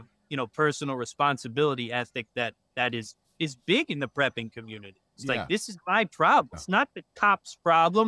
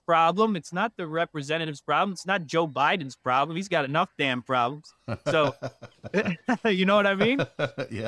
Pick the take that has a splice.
first; 2 cuts; at 5.2 s, 6.6 s

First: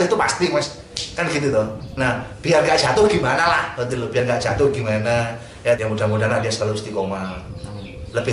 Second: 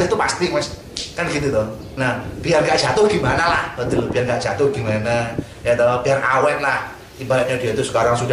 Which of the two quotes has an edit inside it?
first; 1 cut; at 5.8 s

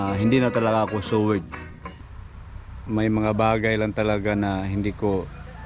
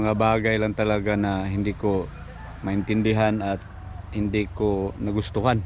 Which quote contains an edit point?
first; 1 cut; at 2.1 s

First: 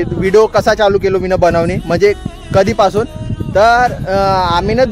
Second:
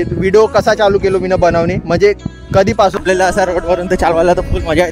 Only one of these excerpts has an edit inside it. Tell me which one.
second; 1 cut; at 2.9 s

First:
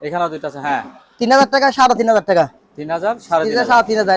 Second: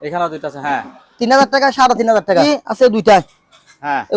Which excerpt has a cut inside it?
second; 1 cut; at 2.4 s

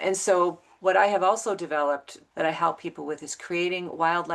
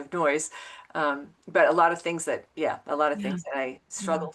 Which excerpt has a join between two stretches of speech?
first; 1 cut; at 2.2 s

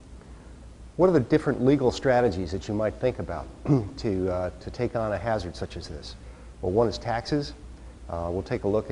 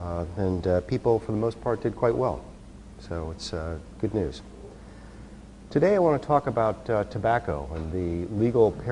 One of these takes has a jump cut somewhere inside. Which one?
first; 1 cut; at 2.5 s

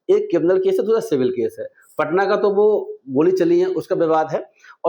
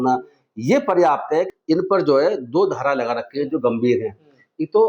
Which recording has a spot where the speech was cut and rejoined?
second; 1 cut; at 1.5 s

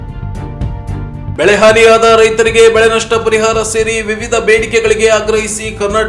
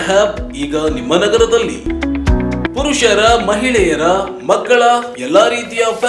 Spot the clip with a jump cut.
first; 1 cut; at 1.3 s

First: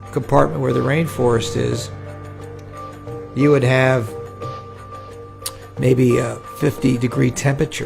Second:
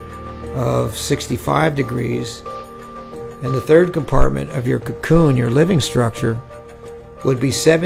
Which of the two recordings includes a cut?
first; 2 cuts; at 4.0 s, 5.5 s

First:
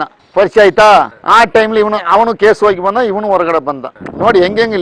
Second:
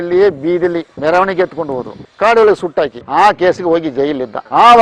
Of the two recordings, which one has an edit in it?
second; 2 cuts; at 0.9 s, 3.0 s

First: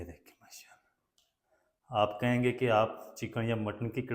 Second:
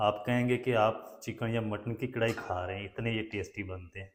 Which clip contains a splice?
first; 1 cut; at 1.0 s

